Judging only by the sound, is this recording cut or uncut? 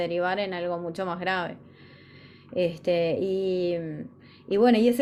uncut